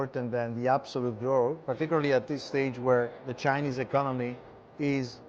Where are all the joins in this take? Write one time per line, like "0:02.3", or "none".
0:01.6
0:03.2